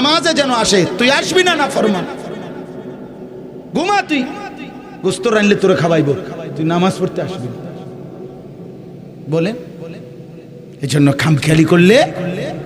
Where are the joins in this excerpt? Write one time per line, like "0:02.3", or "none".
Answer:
none